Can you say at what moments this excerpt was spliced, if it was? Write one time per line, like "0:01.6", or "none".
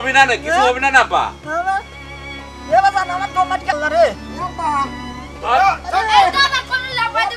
0:03.8